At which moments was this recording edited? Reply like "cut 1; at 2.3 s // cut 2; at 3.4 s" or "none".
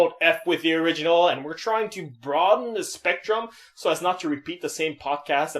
cut 1; at 2.6 s

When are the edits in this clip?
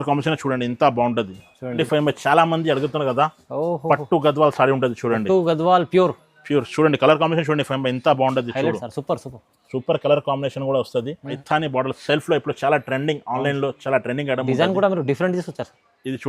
cut 1; at 1.7 s // cut 2; at 11.3 s

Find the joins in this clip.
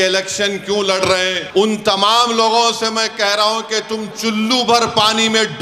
cut 1; at 1.4 s

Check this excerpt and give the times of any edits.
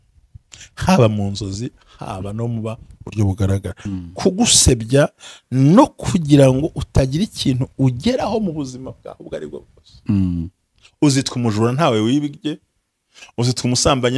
cut 1; at 3.9 s

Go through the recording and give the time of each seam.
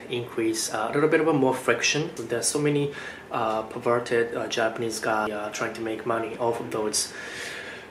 cut 1; at 2.2 s // cut 2; at 5.3 s

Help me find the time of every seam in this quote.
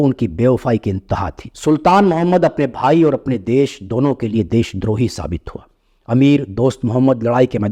none

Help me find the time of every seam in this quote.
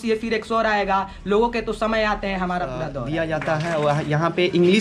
cut 1; at 3.0 s

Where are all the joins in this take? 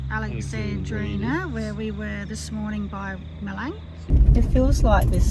cut 1; at 4.1 s

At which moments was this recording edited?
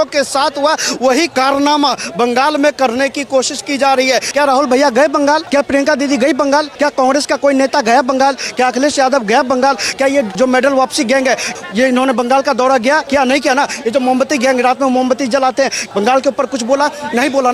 cut 1; at 1.3 s // cut 2; at 4.3 s // cut 3; at 5.5 s // cut 4; at 6.7 s // cut 5; at 10.3 s // cut 6; at 11.6 s // cut 7; at 13.0 s // cut 8; at 15.8 s

